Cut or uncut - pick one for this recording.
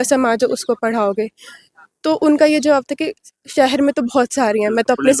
uncut